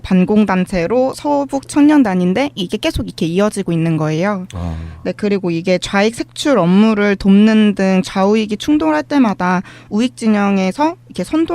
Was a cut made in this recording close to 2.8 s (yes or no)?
yes